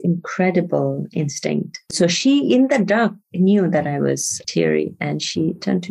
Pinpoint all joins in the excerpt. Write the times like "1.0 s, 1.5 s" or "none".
4.4 s